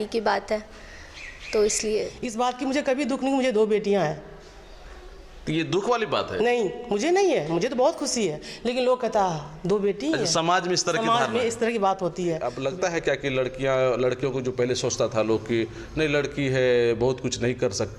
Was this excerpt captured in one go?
no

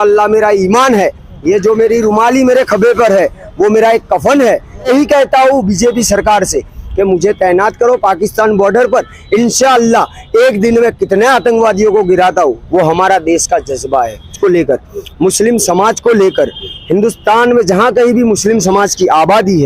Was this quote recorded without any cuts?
no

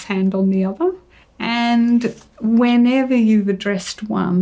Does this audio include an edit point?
no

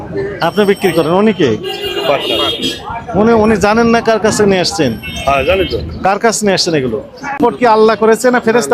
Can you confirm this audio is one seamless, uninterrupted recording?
no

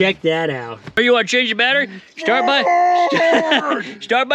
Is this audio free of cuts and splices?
no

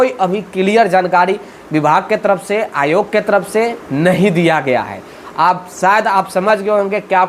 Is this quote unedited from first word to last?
yes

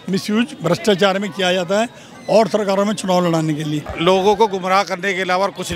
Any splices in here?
yes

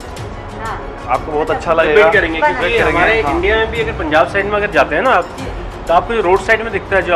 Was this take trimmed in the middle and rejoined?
no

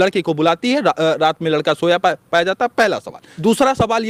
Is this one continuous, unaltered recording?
yes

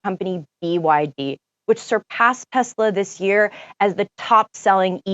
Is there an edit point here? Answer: no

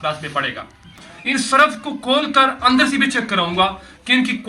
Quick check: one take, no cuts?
no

